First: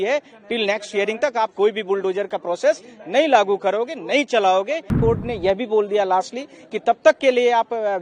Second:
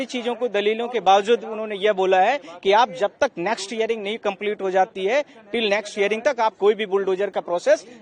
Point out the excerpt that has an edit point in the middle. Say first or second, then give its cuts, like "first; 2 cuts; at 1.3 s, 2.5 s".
first; 1 cut; at 4.9 s